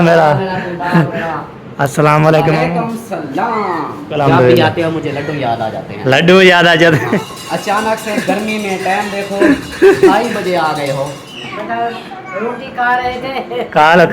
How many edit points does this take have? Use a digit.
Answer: 3